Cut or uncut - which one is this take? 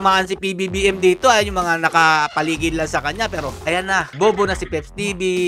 cut